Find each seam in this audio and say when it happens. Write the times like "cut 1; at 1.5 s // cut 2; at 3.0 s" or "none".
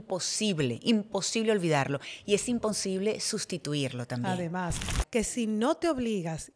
cut 1; at 4.9 s